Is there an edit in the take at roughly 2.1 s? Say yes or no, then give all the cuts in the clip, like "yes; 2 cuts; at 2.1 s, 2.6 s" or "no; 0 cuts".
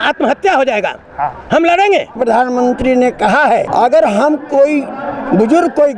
yes; 2 cuts; at 2.1 s, 3.7 s